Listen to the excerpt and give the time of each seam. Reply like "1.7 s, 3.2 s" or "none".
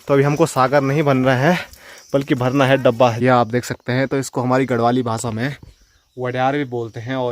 3.2 s